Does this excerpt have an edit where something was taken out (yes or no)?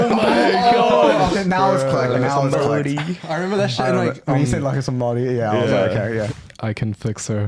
yes